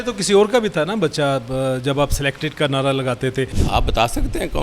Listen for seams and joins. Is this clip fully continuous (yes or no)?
no